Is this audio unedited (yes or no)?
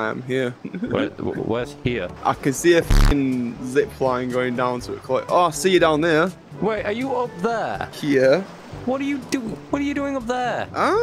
yes